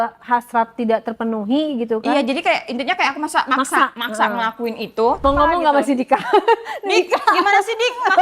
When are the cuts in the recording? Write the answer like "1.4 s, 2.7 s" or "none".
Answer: 5.2 s